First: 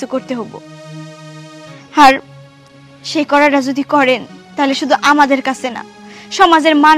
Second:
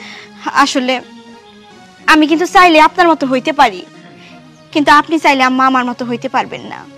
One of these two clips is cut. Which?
first; 1 cut; at 1.7 s

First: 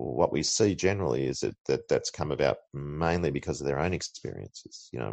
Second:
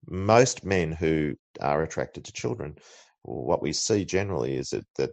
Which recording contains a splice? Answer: second; 1 cut; at 1.4 s

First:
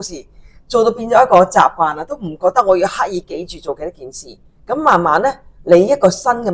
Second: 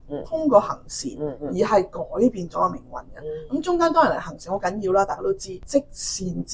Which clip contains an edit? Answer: second; 2 cuts; at 1.3 s, 5.6 s

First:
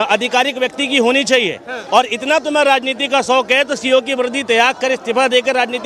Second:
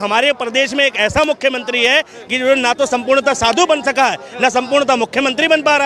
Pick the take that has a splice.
first; 1 cut; at 3.4 s

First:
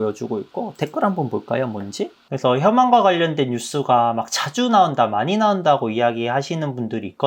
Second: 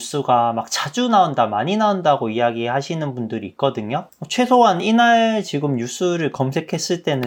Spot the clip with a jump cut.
first; 1 cut; at 2.2 s

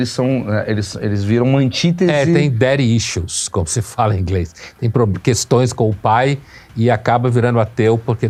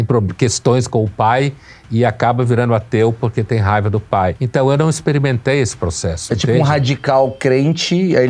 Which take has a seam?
second; 1 cut; at 4.4 s

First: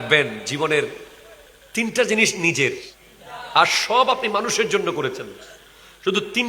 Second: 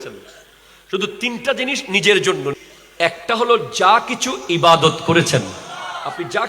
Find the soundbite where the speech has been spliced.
second; 1 cut; at 2.5 s

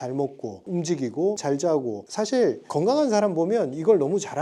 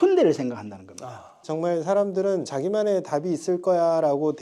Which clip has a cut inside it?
second; 2 cuts; at 1.3 s, 2.5 s

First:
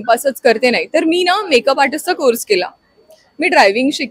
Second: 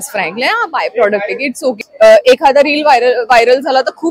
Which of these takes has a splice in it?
second; 1 cut; at 1.8 s

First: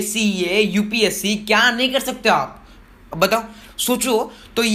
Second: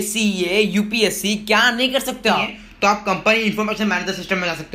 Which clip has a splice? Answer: second; 1 cut; at 2.6 s

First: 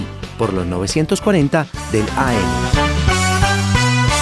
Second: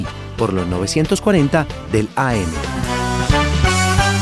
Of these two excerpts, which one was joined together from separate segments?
first; 1 cut; at 2.5 s

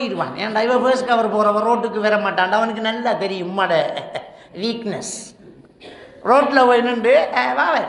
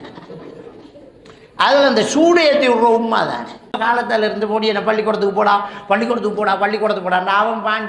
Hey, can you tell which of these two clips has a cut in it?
second; 1 cut; at 3.8 s

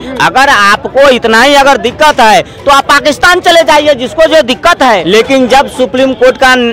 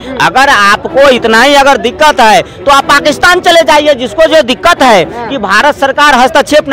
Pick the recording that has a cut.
first; 1 cut; at 5.0 s

